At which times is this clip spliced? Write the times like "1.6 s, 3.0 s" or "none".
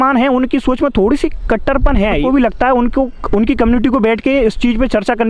2.2 s